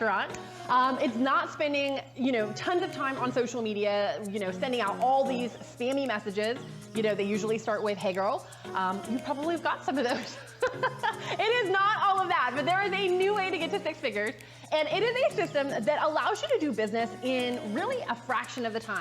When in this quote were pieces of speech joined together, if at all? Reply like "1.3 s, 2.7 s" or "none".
6.1 s, 10.9 s, 16.4 s